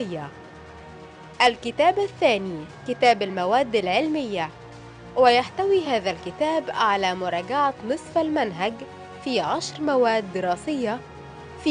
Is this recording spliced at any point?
no; 0 cuts

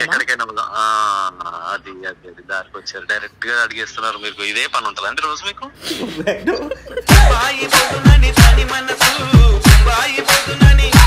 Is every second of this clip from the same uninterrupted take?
no; 1 cut; at 5.8 s

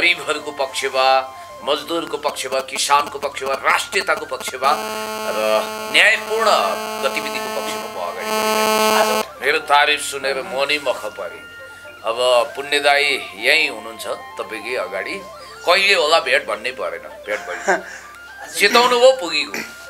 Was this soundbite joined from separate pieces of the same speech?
yes; 1 cut; at 9.3 s

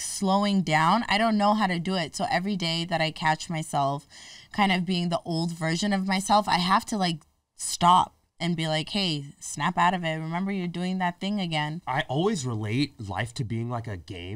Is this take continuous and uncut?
no; 1 cut; at 11.8 s

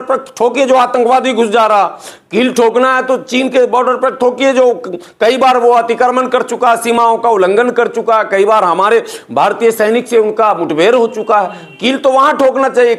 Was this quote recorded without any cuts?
yes; 0 cuts

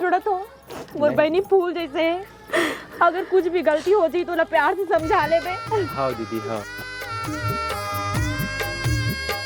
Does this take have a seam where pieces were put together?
no; 0 cuts

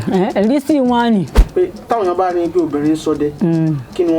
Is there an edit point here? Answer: yes; 1 cut; at 1.4 s

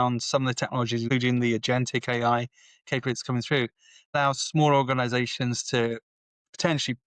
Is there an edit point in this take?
yes; 2 cuts; at 1.1 s, 4.2 s

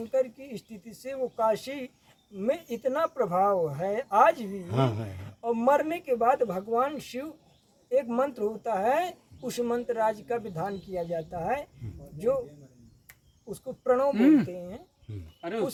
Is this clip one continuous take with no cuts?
yes; 0 cuts

